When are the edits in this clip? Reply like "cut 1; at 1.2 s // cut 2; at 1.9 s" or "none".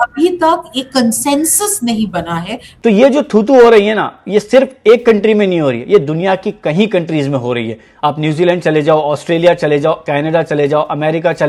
cut 1; at 2.7 s